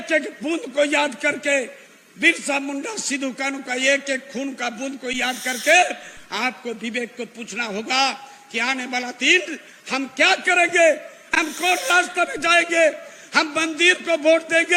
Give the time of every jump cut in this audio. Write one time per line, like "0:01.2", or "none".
none